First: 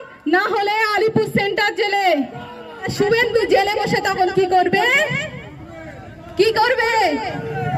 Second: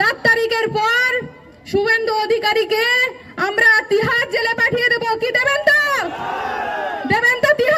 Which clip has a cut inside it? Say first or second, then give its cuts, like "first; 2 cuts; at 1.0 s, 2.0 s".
first; 1 cut; at 2.9 s